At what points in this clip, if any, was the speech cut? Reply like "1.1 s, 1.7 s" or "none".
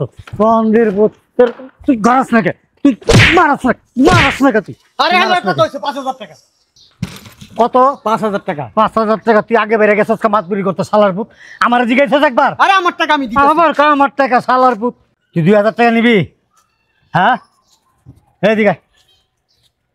none